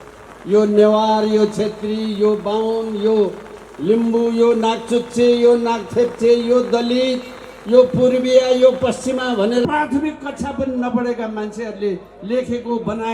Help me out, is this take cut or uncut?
cut